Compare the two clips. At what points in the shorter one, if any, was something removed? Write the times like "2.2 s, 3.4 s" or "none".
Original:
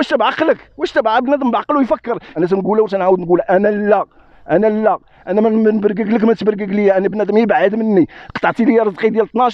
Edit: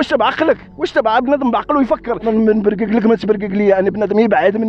2.3 s